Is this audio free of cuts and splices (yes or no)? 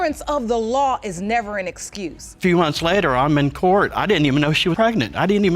no